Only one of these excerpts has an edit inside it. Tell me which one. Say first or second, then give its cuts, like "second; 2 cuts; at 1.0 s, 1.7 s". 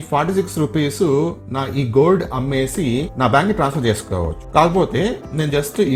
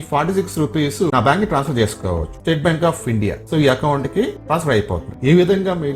second; 3 cuts; at 1.1 s, 2.4 s, 5.0 s